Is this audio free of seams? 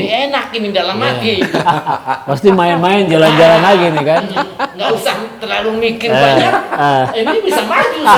yes; 0 cuts

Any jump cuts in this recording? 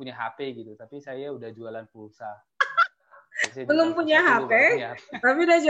no; 0 cuts

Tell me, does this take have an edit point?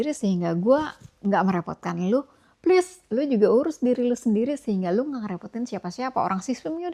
no; 0 cuts

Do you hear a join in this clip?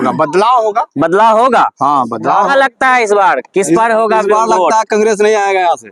yes; 1 cut; at 2.5 s

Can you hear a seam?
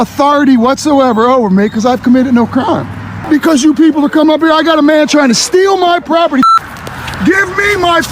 yes; 2 cuts; at 3.1 s, 6.5 s

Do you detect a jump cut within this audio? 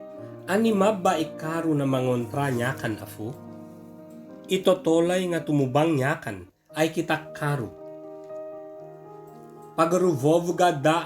yes; 2 cuts; at 7.7 s, 9.7 s

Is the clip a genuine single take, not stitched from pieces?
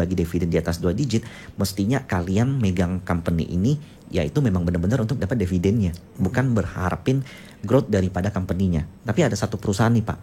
yes; 0 cuts

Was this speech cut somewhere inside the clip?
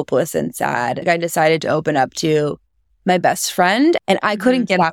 yes; 2 cuts; at 1.0 s, 4.0 s

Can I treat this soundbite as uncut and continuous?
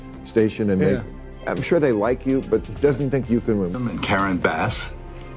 no; 1 cut; at 3.7 s

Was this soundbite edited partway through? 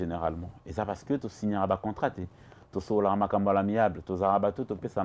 no; 0 cuts

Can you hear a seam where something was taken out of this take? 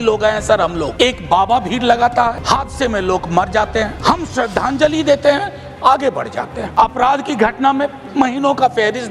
yes; 4 cuts; at 0.9 s, 2.4 s, 4.0 s, 6.6 s

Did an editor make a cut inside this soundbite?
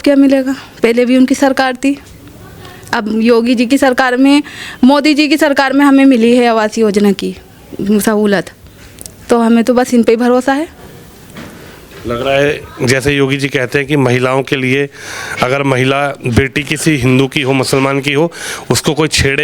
no; 0 cuts

